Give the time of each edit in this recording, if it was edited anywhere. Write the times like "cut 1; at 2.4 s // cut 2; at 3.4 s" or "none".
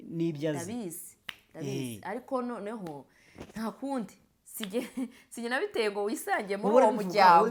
none